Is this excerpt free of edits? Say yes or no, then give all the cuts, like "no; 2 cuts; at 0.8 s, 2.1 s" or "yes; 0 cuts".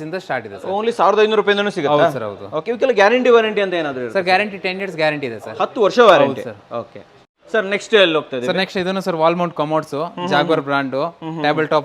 yes; 0 cuts